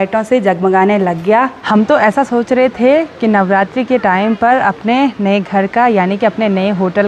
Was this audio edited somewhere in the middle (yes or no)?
yes